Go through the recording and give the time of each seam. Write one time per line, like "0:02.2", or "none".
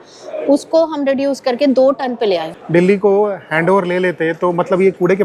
0:02.5